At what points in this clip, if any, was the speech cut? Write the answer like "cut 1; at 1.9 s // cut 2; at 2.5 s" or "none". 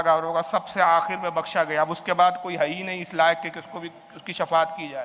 none